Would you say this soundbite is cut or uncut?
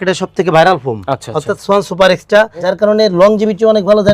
cut